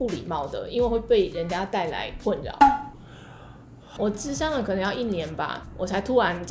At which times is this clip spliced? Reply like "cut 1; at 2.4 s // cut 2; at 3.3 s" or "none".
cut 1; at 3.9 s // cut 2; at 5.6 s